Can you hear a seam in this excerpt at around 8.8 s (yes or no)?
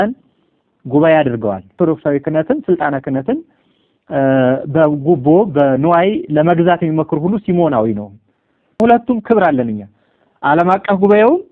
yes